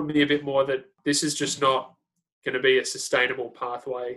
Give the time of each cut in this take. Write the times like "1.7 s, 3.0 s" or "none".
1.0 s